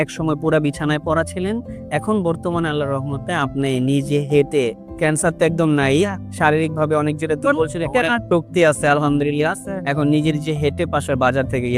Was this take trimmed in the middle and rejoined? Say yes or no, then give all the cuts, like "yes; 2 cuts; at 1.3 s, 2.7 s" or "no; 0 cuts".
no; 0 cuts